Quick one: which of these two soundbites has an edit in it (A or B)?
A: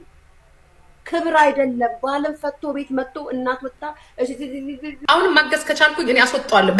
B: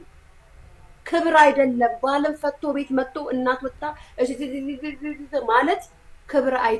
A